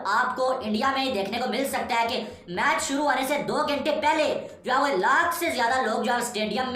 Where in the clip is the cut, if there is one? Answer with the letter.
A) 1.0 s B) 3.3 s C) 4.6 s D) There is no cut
D